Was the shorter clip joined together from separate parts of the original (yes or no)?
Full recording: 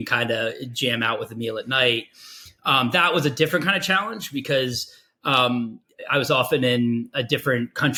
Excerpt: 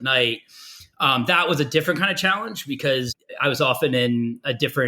yes